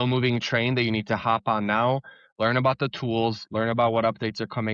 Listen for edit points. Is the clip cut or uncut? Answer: uncut